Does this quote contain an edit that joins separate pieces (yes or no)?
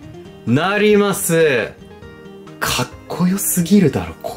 no